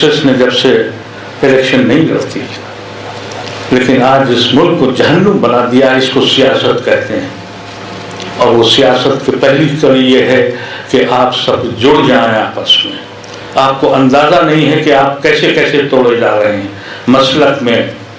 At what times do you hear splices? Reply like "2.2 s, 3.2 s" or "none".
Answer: none